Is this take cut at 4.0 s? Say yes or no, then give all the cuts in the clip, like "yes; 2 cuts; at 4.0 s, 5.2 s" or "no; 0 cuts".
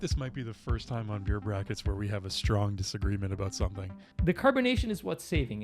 yes; 1 cut; at 4.0 s